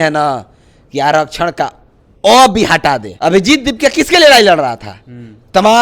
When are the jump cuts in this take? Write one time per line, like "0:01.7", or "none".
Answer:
0:03.1